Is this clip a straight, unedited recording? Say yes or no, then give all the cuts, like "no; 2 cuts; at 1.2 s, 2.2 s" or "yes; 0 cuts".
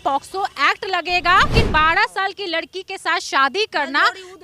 no; 1 cut; at 1.5 s